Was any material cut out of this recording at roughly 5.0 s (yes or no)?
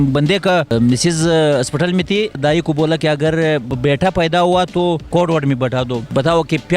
no